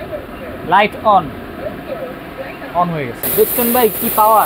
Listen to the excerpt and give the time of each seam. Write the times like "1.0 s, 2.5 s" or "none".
3.2 s

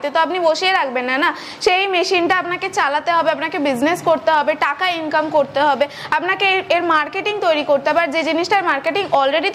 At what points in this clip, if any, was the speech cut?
none

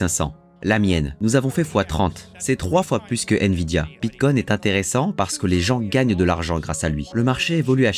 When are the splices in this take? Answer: 1.1 s, 2.3 s, 3.9 s, 7.0 s

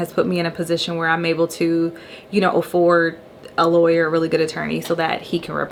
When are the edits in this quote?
none

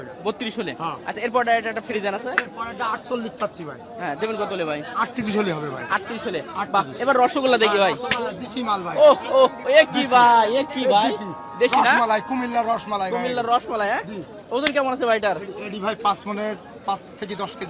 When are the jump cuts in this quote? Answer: none

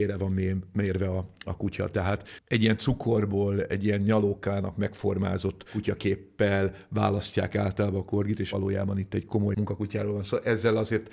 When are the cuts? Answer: 8.5 s, 9.5 s

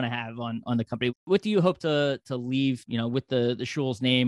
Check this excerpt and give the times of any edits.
1.2 s, 2.8 s

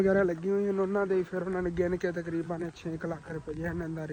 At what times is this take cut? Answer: none

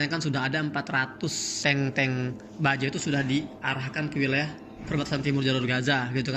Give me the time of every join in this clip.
1.5 s

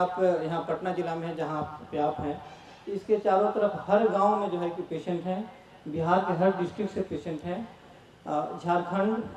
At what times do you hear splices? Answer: none

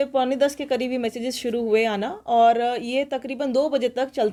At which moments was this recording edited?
none

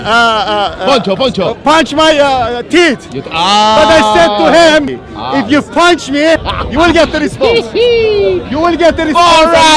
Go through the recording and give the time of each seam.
4.9 s, 6.5 s

